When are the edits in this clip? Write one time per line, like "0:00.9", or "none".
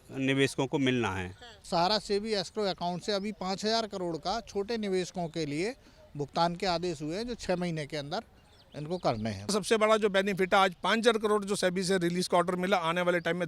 0:01.6
0:09.5